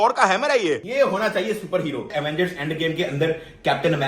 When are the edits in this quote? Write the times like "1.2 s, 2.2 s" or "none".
0.9 s, 2.1 s